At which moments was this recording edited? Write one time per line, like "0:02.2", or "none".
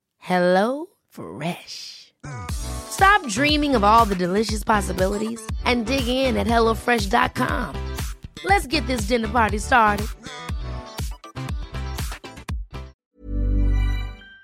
0:13.0